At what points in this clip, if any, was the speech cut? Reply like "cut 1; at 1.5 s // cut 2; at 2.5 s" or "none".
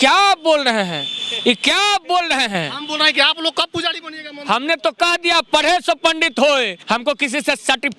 cut 1; at 6.8 s